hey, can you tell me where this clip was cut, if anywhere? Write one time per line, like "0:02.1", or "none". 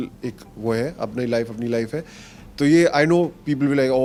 none